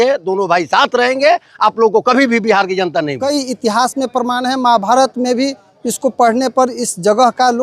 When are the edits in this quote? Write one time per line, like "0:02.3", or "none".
0:03.3

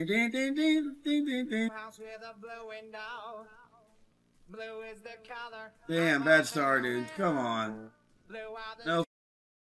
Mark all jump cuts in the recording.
0:01.7

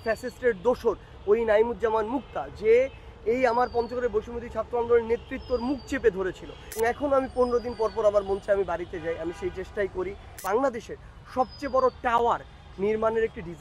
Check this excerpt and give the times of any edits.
0:06.6
0:10.4

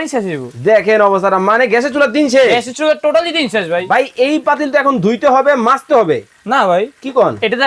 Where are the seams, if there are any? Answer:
0:03.8

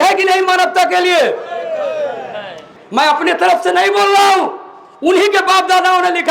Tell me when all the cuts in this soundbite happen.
none

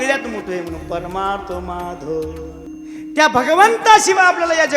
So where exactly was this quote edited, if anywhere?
0:02.7

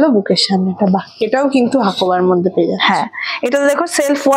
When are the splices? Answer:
none

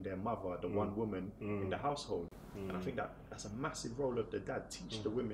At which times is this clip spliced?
none

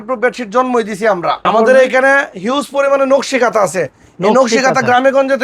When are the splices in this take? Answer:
0:01.4

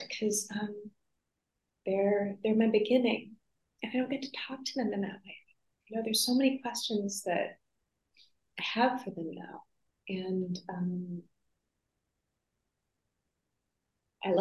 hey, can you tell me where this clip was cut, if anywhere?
none

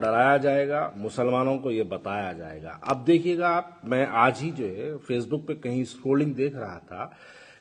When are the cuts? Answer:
none

